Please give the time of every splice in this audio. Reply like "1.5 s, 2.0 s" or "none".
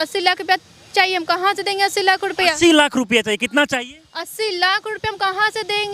none